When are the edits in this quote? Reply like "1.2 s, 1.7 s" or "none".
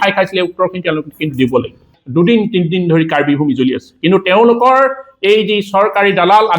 2.0 s

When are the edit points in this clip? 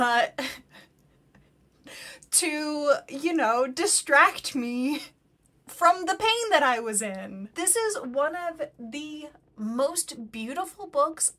7.4 s

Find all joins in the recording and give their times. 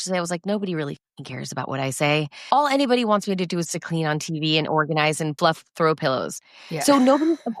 2.3 s, 5.3 s

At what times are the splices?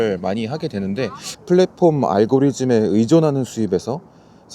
1.3 s

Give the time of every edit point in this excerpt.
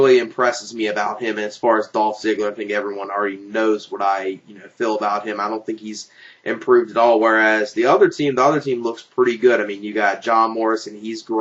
none

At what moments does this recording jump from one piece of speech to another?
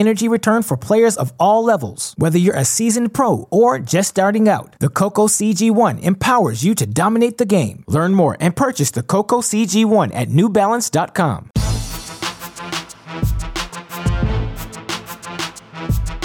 11.5 s

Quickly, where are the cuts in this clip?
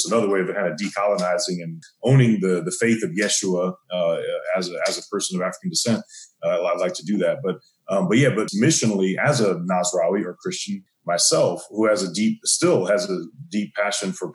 1.8 s, 8.5 s, 10.8 s

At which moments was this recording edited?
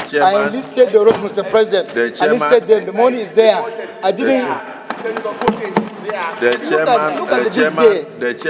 none

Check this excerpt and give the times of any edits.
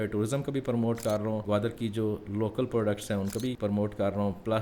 1.4 s, 3.6 s

